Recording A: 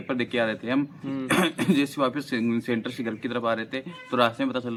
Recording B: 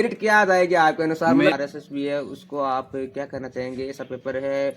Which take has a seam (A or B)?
B